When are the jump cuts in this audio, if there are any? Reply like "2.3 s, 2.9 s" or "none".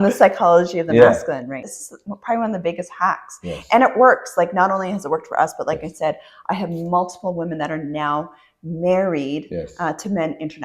1.7 s